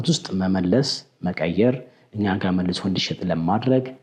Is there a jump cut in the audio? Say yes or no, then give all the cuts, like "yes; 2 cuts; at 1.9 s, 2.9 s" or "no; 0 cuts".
no; 0 cuts